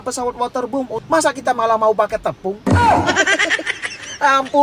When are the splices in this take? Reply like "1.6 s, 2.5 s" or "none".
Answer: 1.0 s